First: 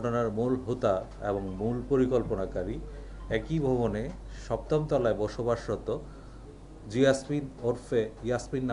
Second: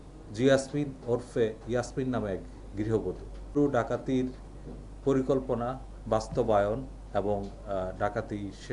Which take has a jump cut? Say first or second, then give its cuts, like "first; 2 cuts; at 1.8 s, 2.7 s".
second; 1 cut; at 3.6 s